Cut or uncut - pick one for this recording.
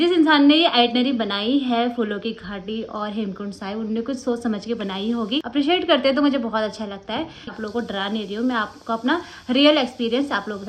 cut